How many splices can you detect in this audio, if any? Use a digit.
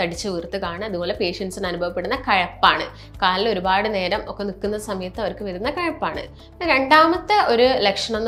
0